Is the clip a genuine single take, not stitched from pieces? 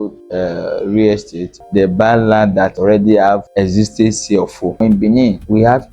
no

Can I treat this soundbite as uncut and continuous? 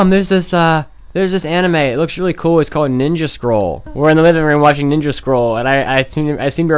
no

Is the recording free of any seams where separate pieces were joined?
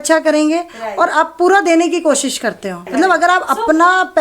no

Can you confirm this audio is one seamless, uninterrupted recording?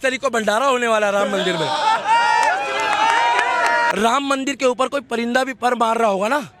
no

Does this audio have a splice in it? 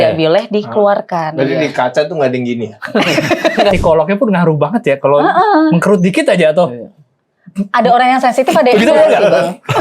yes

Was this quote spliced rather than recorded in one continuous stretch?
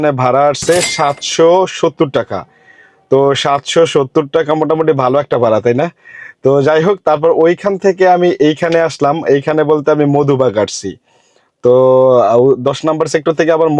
no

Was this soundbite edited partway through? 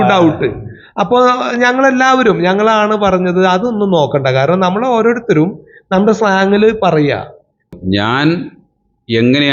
yes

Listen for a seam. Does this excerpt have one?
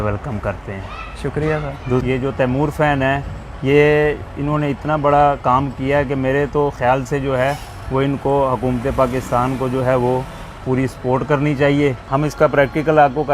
yes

